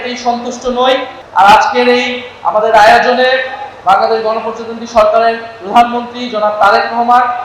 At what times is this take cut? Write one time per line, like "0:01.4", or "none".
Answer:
0:01.2